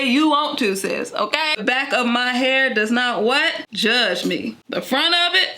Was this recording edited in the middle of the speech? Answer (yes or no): yes